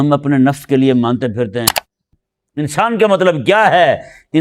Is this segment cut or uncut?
cut